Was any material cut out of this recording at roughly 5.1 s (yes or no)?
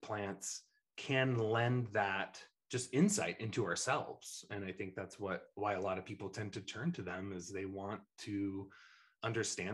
no